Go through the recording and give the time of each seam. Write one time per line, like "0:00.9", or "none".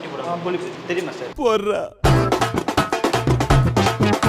0:01.2